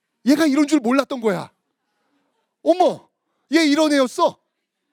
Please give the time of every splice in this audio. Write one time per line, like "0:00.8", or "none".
none